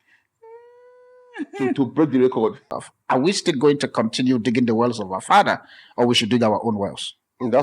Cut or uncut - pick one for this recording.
cut